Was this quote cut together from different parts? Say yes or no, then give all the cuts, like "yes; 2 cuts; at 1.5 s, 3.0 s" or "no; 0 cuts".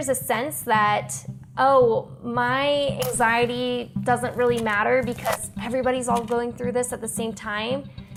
no; 0 cuts